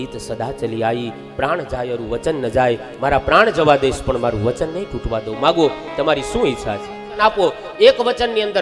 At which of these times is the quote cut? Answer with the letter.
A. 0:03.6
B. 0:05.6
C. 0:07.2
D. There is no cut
C